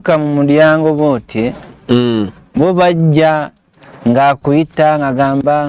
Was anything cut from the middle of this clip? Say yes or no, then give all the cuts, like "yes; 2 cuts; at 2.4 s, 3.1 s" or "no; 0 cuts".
no; 0 cuts